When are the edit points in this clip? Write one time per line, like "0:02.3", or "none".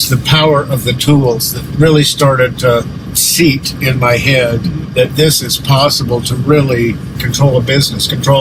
0:04.8
0:07.1